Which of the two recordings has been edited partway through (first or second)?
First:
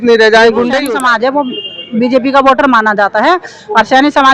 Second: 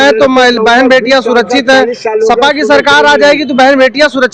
first